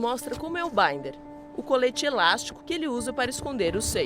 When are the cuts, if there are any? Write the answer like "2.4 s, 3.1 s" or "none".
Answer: 2.5 s